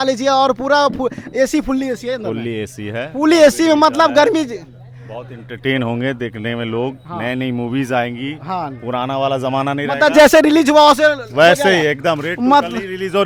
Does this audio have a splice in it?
no; 0 cuts

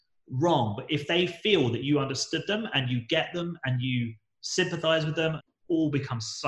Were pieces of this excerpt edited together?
yes; 1 cut; at 5.4 s

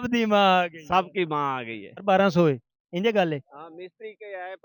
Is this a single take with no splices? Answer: no; 1 cut; at 1.9 s

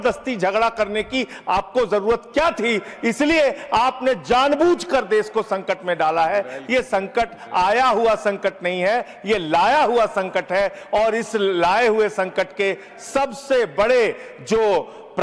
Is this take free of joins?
yes; 0 cuts

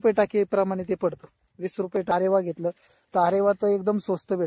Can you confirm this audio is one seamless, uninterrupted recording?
no; 1 cut; at 2.1 s

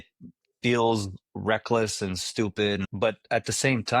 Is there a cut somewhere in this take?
yes; 1 cut; at 2.9 s

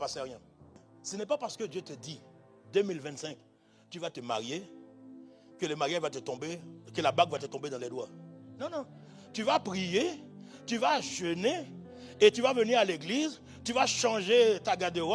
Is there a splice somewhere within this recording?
yes; 1 cut; at 0.9 s

